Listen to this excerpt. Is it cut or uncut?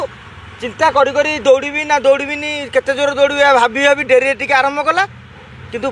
uncut